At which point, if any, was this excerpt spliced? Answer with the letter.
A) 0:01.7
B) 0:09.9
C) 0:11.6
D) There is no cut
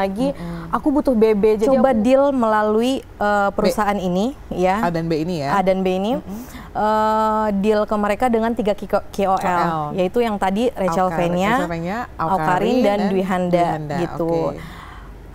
A